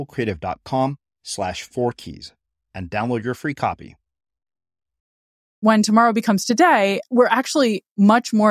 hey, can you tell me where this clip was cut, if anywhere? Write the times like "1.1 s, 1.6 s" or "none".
5.6 s, 7.0 s